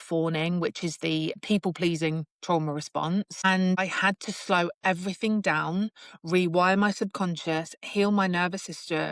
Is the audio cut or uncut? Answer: uncut